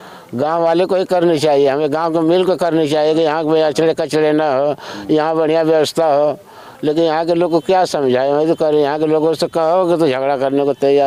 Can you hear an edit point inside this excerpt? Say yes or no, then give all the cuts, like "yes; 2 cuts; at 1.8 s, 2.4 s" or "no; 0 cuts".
no; 0 cuts